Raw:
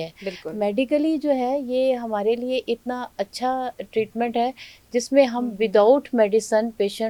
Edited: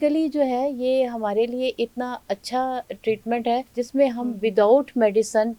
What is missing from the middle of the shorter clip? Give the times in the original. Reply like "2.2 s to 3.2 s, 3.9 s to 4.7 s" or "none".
4.6 s to 4.9 s